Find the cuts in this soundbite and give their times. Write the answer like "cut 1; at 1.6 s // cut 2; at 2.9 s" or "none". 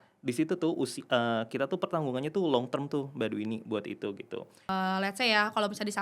cut 1; at 4.7 s